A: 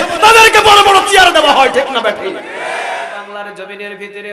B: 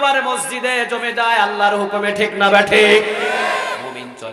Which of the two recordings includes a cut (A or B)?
A